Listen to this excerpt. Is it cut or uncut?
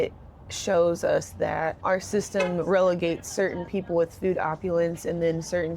cut